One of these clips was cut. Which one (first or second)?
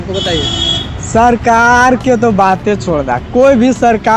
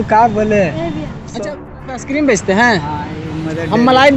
second